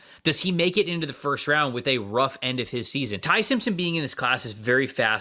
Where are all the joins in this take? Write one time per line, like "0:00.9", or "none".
0:03.2